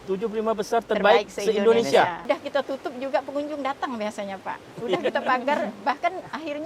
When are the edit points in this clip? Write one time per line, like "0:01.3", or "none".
0:02.2

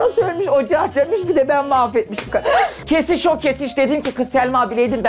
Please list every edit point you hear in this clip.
0:02.8

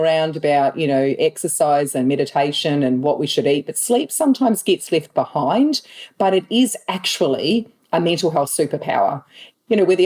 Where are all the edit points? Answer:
none

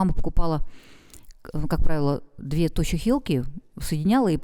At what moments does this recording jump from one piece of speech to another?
none

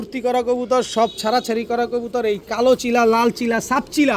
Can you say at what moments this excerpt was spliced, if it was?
none

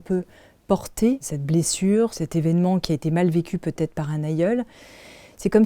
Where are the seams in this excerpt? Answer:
0:01.3
0:02.1

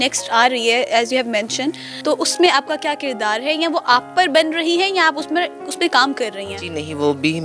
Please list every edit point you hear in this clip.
0:02.0

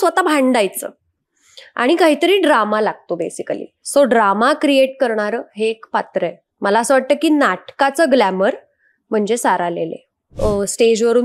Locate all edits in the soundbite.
0:10.3

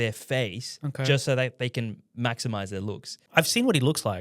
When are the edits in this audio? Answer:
0:03.2

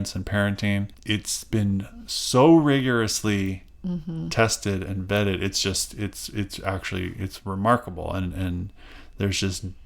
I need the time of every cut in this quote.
0:01.0

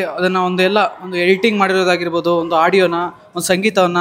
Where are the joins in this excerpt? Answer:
none

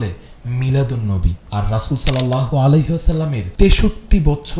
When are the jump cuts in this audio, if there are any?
0:01.4
0:03.4

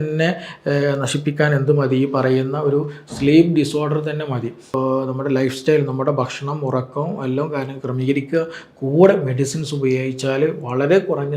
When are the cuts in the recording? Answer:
0:04.6

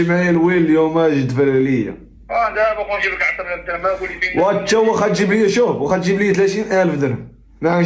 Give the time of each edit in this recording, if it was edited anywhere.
none

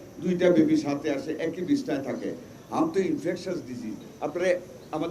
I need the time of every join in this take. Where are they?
0:04.1

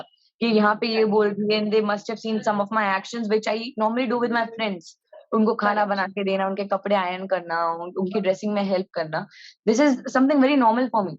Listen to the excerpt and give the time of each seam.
none

